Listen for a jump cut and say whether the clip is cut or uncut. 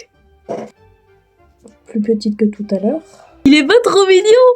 cut